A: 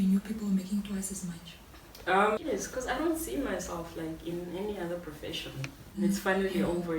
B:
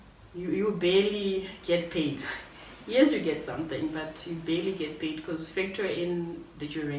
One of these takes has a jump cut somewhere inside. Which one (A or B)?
A